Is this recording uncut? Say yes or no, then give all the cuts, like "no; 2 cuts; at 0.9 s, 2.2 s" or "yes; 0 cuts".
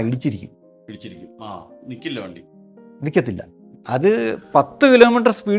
yes; 0 cuts